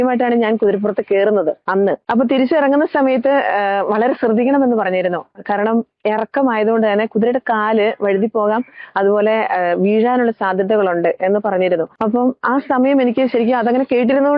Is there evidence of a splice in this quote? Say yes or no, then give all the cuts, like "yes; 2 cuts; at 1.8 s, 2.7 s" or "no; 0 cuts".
no; 0 cuts